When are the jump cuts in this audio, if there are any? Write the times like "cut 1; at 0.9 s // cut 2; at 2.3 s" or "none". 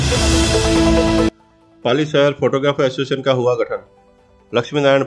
none